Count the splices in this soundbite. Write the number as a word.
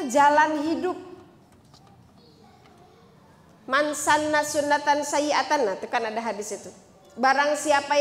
zero